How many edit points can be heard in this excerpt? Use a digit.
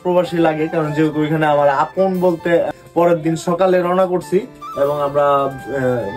1